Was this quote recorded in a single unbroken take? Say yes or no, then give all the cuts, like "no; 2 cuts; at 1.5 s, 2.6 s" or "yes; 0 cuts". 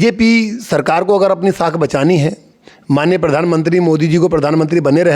yes; 0 cuts